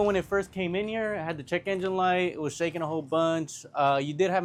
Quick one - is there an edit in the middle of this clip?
no; 0 cuts

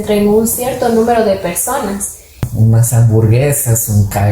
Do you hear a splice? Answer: yes; 1 cut; at 2.4 s

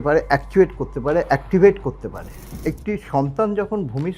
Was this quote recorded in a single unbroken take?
no; 1 cut; at 2.4 s

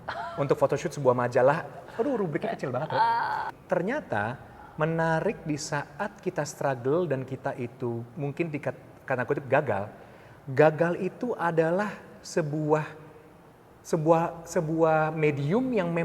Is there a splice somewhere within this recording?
yes; 1 cut; at 3.5 s

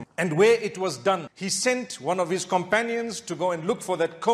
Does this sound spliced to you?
no; 0 cuts

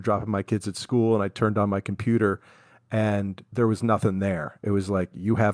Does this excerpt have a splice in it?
no; 0 cuts

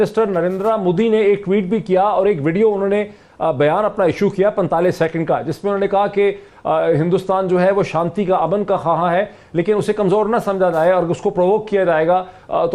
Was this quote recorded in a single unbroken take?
yes; 0 cuts

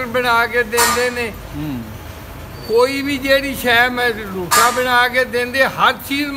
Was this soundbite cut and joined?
no; 0 cuts

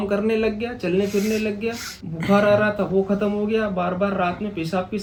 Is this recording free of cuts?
yes; 0 cuts

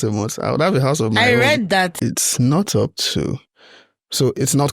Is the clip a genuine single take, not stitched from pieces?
no; 1 cut; at 1.9 s

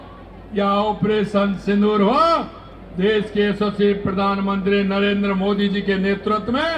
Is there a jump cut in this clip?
no; 0 cuts

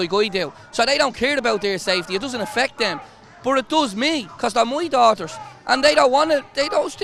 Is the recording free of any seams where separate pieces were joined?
yes; 0 cuts

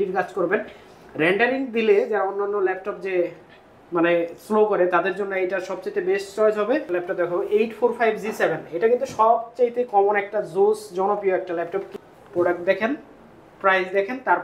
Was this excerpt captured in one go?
no; 2 cuts; at 6.9 s, 11.9 s

